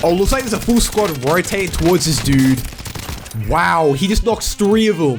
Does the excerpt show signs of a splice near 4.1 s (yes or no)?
no